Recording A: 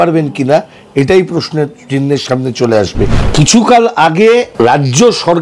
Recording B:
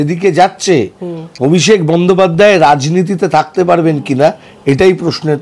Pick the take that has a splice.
A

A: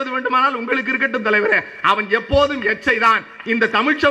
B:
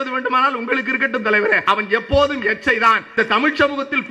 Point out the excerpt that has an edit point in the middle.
B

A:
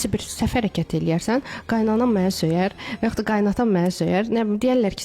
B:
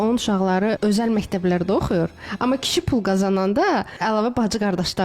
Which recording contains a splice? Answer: B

